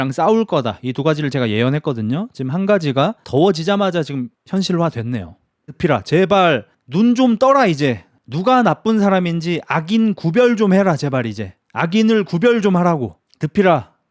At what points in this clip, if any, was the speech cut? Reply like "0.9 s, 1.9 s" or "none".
3.2 s, 5.6 s

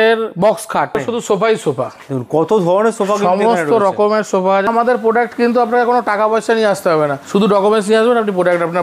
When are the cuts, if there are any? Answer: 1.0 s, 4.7 s, 7.2 s

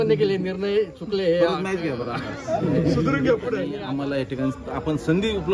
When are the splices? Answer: 3.7 s

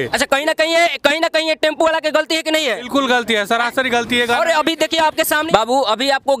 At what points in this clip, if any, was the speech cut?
5.4 s

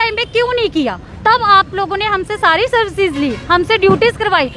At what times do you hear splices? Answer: none

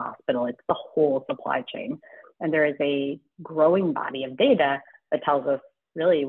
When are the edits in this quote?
none

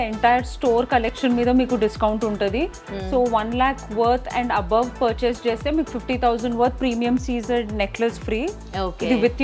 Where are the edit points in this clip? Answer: none

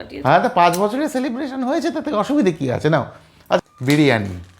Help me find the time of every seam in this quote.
3.6 s

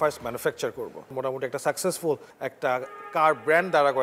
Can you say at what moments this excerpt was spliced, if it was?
1.1 s, 2.3 s

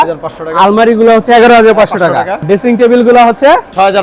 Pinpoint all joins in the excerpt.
2.4 s

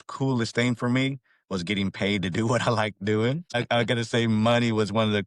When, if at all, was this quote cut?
3.5 s

